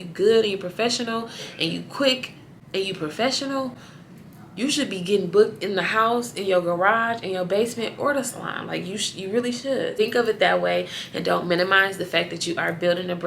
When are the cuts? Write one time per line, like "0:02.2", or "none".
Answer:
0:09.9